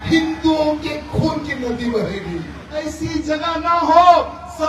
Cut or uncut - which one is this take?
cut